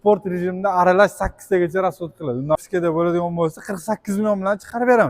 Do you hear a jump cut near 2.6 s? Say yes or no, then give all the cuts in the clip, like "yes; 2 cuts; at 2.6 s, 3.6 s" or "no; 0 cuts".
yes; 1 cut; at 2.6 s